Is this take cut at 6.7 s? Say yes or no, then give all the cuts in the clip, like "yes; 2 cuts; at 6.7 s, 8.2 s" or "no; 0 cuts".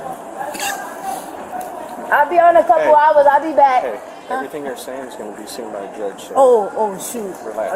no; 0 cuts